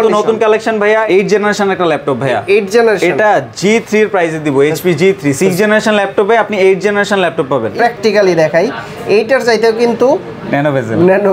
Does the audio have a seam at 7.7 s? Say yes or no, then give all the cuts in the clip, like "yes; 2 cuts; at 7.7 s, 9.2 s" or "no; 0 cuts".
yes; 2 cuts; at 1.0 s, 7.7 s